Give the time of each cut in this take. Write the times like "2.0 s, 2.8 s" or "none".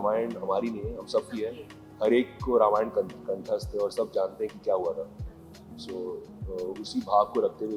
none

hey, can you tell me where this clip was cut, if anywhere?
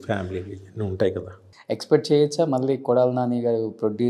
1.5 s

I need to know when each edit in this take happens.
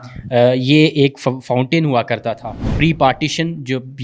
2.7 s

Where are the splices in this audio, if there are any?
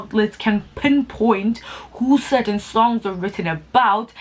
none

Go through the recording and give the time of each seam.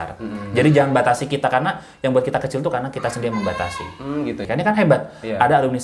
4.4 s

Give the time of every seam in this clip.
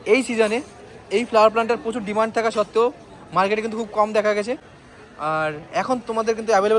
none

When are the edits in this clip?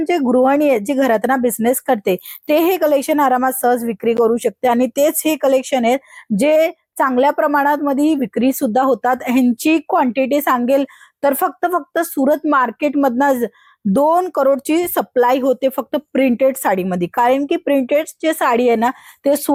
none

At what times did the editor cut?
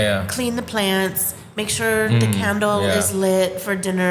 none

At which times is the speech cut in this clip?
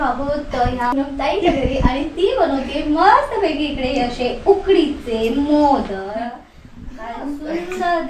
none

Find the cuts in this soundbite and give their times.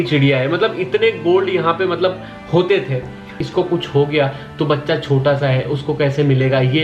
3.4 s

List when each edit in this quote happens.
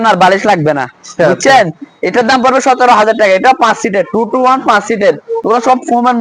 none

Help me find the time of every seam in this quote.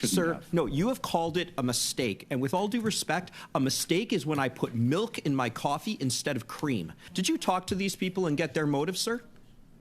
7.1 s

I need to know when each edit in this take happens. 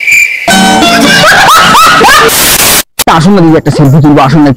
none

